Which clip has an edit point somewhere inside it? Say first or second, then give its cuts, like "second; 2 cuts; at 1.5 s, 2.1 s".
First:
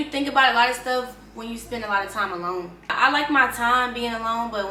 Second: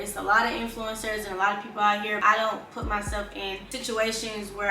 second; 2 cuts; at 2.2 s, 3.7 s